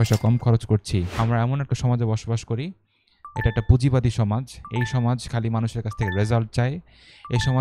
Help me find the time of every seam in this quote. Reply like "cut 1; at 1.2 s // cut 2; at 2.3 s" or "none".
cut 1; at 1.1 s